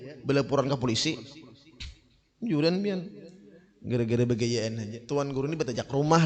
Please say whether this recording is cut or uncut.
cut